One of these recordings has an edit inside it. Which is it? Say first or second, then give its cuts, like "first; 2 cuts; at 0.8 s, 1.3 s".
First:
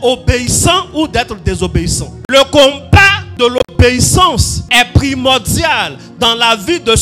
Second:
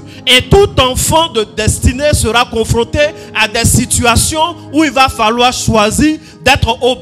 first; 3 cuts; at 2.1 s, 3.2 s, 4.5 s